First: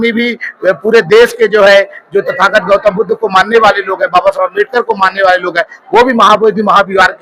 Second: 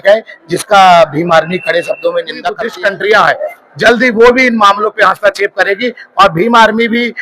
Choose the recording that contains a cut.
second; 1 cut; at 2.6 s

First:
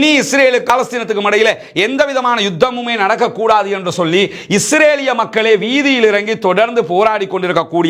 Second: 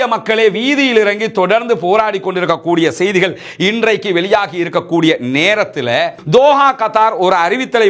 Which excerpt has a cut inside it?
second; 1 cut; at 6.2 s

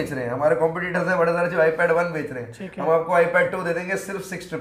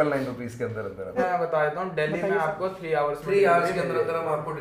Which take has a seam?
second; 1 cut; at 1.2 s

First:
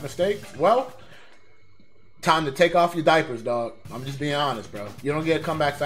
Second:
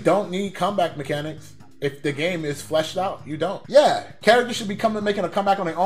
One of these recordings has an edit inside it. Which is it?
first; 1 cut; at 4.8 s

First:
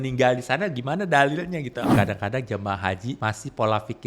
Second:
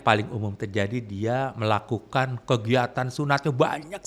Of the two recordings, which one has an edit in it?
first; 2 cuts; at 1.9 s, 3.2 s

